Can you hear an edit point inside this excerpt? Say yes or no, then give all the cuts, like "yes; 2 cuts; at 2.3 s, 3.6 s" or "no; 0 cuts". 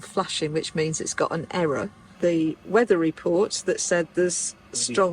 yes; 1 cut; at 2.0 s